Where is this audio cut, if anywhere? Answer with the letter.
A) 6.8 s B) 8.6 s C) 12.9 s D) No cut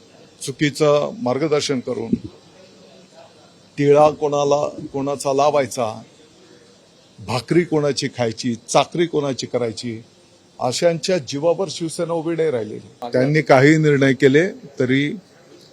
C